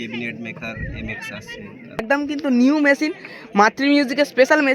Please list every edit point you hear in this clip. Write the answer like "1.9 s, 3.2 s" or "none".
2.0 s